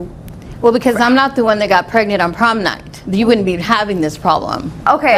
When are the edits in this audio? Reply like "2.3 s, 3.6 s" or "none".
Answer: none